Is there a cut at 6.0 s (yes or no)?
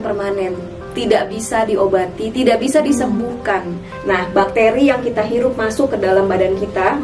no